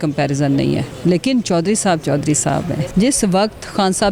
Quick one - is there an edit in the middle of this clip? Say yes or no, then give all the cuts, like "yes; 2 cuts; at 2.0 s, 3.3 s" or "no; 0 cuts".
yes; 1 cut; at 2.8 s